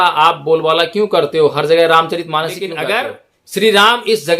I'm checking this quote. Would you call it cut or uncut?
cut